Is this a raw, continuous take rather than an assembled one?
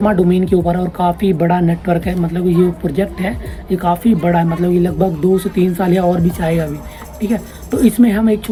yes; 0 cuts

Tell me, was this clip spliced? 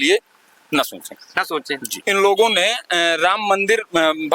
yes; 1 cut; at 1.9 s

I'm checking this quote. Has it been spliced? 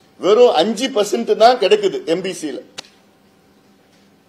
no; 0 cuts

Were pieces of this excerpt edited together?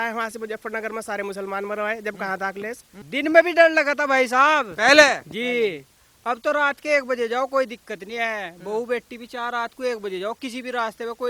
yes; 1 cut; at 2.9 s

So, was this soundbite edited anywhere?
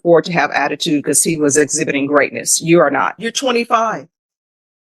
yes; 1 cut; at 3.3 s

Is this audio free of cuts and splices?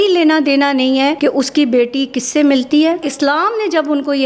no; 2 cuts; at 1.2 s, 3.1 s

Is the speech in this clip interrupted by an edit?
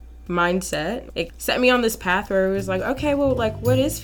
yes; 1 cut; at 1.0 s

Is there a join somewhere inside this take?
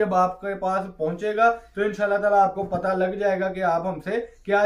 no; 0 cuts

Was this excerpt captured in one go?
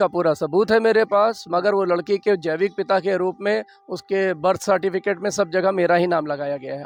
yes; 0 cuts

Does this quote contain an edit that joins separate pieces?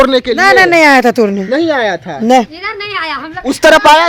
no; 0 cuts

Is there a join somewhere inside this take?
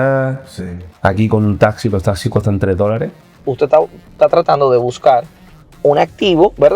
yes; 1 cut; at 3.3 s

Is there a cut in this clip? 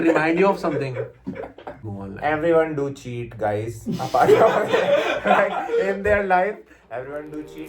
yes; 1 cut; at 1.8 s

